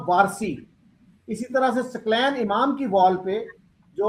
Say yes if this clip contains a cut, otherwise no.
no